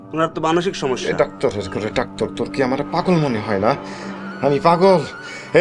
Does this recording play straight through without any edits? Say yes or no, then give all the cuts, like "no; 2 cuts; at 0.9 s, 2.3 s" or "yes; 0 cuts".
no; 1 cut; at 1.0 s